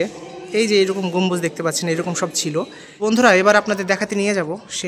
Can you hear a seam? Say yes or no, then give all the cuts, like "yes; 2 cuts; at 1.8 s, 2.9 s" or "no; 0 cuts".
yes; 1 cut; at 2.8 s